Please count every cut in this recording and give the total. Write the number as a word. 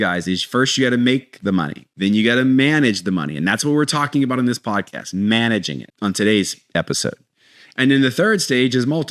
two